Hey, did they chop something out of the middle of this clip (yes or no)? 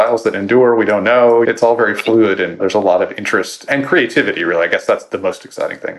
yes